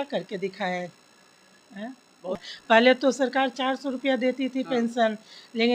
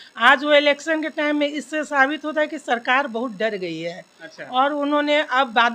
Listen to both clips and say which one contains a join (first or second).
first